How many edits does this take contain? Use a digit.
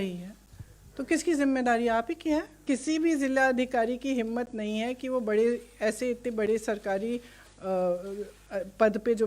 1